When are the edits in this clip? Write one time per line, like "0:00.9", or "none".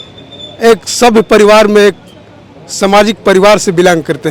none